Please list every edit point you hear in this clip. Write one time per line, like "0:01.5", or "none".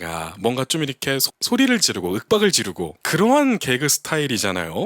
0:03.0